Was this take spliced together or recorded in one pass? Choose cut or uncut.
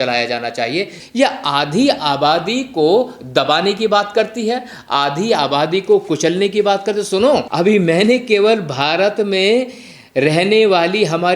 cut